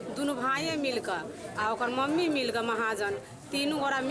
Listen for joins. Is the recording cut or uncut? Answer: uncut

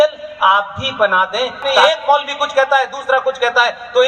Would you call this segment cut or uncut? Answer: cut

